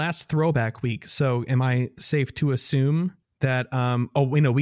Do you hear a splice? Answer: yes; 1 cut; at 3.3 s

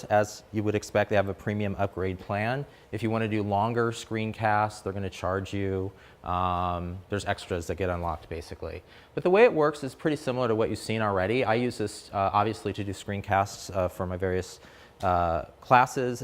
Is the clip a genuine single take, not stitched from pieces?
no; 1 cut; at 15.1 s

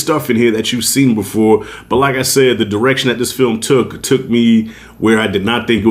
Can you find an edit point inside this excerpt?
no; 0 cuts

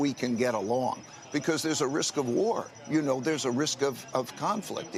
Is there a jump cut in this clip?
no; 0 cuts

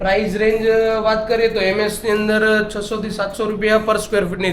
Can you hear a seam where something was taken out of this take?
no; 0 cuts

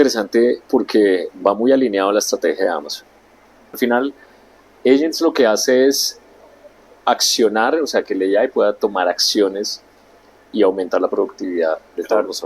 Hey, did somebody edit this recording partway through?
yes; 1 cut; at 3.8 s

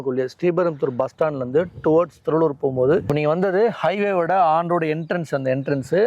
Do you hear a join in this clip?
no; 0 cuts

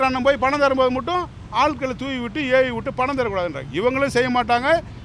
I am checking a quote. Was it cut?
no; 0 cuts

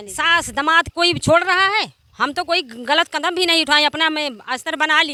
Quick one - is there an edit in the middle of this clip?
no; 0 cuts

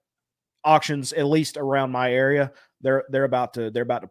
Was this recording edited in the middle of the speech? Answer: no; 0 cuts

